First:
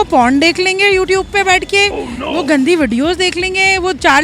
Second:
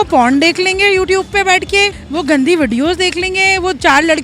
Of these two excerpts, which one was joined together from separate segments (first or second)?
second